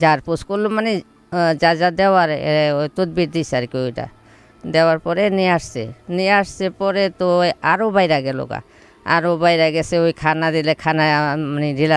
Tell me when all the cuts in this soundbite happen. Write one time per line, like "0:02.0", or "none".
none